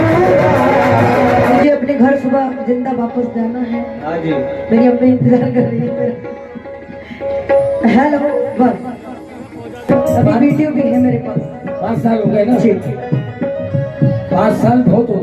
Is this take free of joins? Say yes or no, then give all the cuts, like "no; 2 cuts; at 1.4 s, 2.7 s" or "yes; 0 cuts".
no; 2 cuts; at 1.5 s, 9.9 s